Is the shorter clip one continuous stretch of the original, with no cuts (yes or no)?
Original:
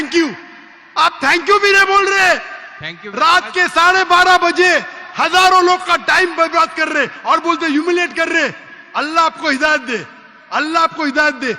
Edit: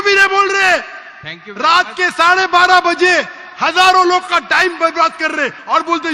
yes